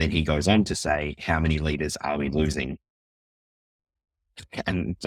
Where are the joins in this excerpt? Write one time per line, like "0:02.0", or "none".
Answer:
none